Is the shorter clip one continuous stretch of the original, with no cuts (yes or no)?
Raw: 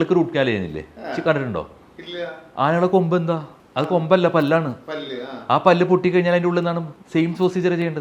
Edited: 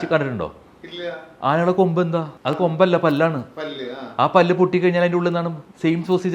no